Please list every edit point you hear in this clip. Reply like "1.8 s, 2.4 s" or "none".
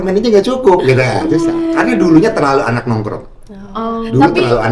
none